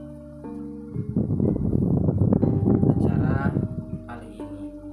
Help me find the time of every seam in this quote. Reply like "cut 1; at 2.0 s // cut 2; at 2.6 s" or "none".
cut 1; at 1.1 s // cut 2; at 3.9 s